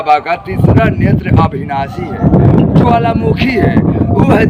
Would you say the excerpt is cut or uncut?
uncut